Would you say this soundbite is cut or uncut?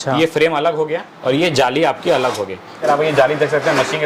cut